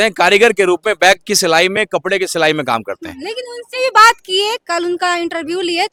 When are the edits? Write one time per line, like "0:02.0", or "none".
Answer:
none